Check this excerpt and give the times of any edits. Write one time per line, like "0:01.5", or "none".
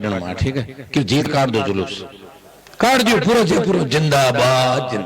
0:01.3